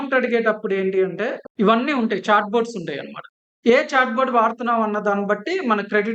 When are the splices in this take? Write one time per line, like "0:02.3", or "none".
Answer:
0:01.5

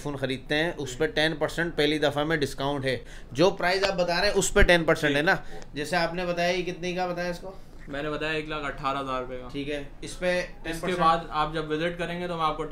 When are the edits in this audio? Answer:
none

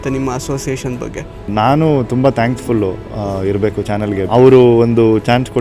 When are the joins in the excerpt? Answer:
0:01.5
0:04.2

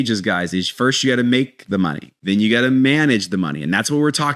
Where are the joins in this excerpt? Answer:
0:02.1

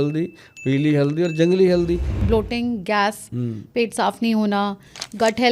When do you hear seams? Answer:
0:02.1

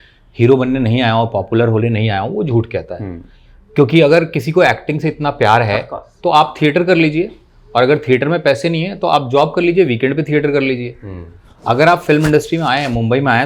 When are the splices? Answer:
none

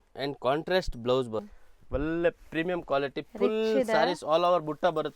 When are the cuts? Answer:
0:01.6

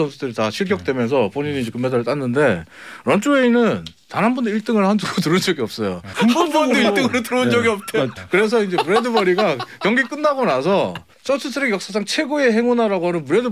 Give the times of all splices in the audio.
0:06.1
0:08.1
0:11.1

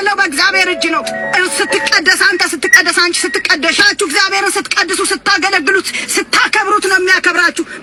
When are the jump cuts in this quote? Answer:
none

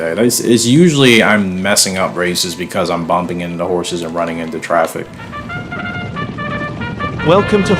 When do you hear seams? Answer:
0:05.2

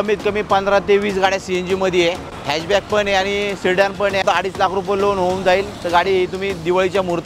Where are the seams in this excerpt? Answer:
0:02.3
0:04.2

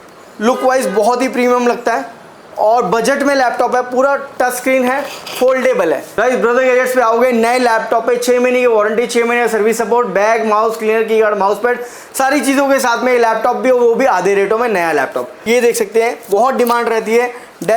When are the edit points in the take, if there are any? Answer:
0:06.1
0:15.3

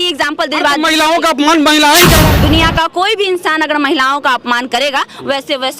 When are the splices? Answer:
0:02.2

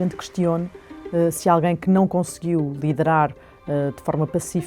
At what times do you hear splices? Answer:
none

